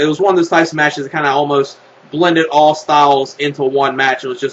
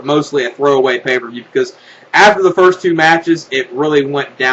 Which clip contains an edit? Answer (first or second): first